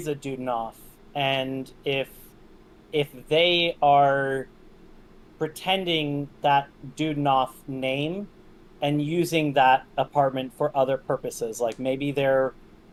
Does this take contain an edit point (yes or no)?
no